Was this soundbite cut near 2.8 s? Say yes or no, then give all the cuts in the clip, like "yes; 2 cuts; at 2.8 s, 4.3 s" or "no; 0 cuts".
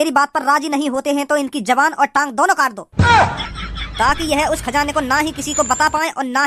yes; 1 cut; at 2.8 s